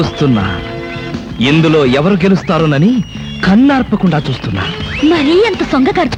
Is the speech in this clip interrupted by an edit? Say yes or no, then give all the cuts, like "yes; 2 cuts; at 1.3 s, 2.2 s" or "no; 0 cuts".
no; 0 cuts